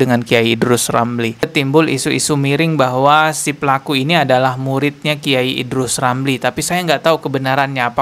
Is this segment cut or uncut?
cut